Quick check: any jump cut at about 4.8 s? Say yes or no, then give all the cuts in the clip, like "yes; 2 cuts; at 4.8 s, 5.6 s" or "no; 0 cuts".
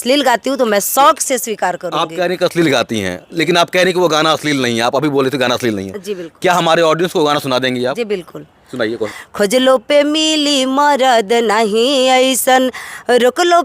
no; 1 cut; at 9.1 s